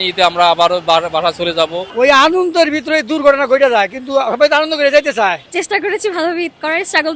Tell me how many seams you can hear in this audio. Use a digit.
2